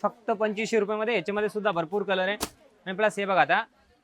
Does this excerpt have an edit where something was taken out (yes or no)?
no